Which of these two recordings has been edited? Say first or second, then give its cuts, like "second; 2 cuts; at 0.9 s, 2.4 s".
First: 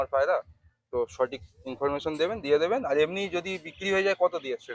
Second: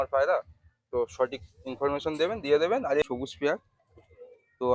second; 1 cut; at 3.0 s